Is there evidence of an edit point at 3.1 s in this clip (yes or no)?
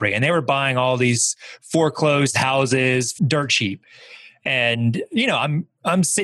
yes